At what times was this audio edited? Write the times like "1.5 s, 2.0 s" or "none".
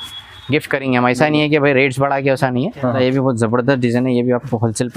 3.0 s